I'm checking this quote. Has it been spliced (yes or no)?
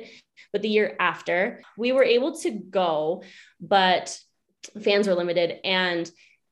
yes